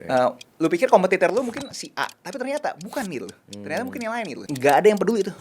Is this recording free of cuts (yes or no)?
no